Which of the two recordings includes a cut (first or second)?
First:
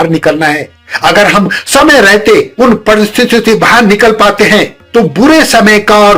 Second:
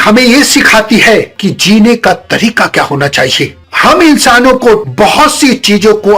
second